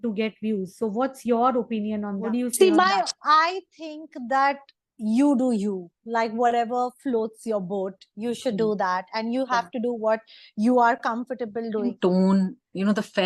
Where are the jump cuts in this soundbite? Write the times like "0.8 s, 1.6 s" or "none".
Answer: 2.2 s, 11.8 s